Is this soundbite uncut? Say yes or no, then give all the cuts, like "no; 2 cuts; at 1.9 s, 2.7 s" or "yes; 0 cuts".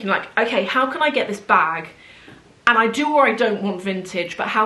yes; 0 cuts